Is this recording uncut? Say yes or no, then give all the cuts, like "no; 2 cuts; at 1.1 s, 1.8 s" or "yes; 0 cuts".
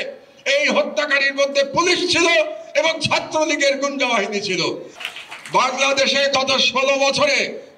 no; 1 cut; at 4.9 s